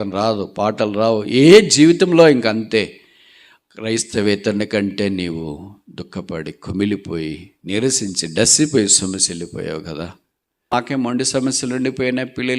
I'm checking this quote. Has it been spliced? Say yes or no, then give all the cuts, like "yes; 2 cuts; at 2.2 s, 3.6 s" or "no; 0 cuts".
yes; 1 cut; at 10.7 s